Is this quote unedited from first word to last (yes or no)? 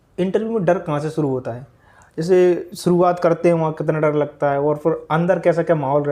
yes